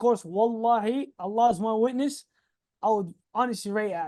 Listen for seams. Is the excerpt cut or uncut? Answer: uncut